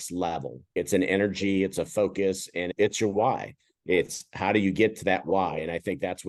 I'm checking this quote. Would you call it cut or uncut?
uncut